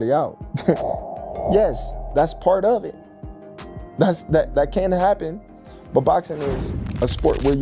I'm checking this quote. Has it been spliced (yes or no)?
no